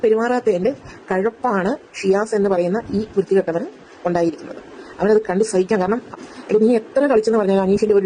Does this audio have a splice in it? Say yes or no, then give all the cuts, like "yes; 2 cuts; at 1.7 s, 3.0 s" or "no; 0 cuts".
yes; 1 cut; at 6.6 s